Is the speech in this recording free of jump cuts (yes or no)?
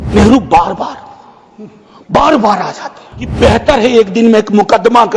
no